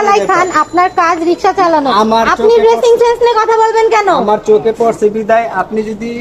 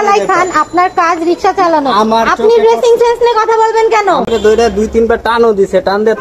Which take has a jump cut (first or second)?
second